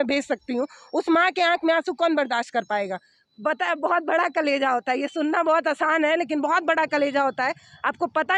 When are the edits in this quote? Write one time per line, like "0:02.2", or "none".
none